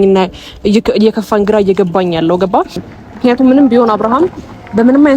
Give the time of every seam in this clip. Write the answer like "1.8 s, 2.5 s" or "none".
2.8 s